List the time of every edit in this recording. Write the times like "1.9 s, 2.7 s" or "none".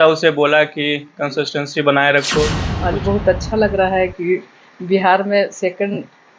2.7 s

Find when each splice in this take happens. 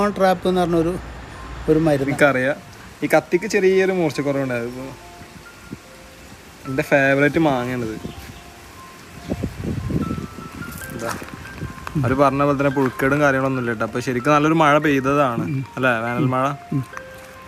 2.1 s

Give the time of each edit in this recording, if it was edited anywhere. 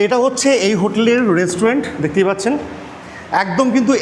none

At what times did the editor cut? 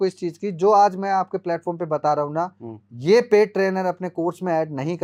none

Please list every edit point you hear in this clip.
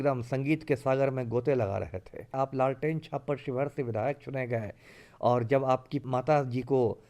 2.3 s, 6.0 s

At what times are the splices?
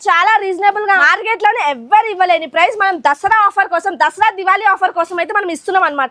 1.0 s

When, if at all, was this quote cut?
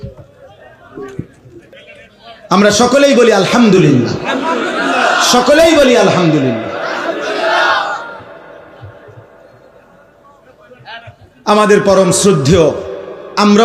1.7 s

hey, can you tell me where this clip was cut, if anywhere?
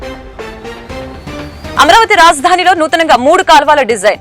1.8 s

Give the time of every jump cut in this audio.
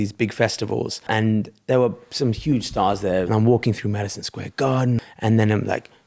1.1 s, 3.3 s, 5.1 s

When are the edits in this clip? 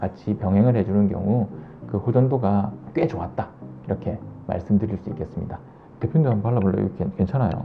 none

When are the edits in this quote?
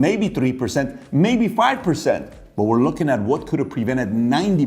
none

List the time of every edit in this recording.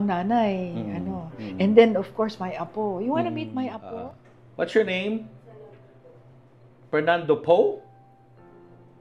3.8 s

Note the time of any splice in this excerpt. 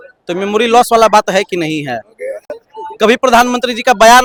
none

